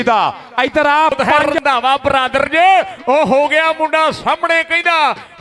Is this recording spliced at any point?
yes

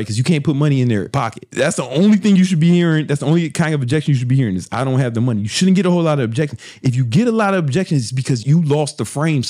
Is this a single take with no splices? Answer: no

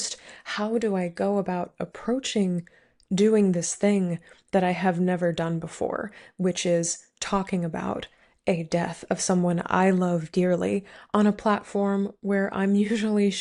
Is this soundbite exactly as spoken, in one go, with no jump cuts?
yes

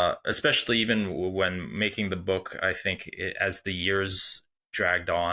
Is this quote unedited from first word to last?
yes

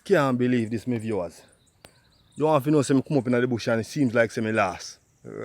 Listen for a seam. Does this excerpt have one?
no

